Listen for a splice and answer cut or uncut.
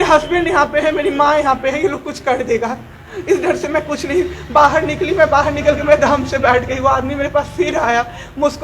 uncut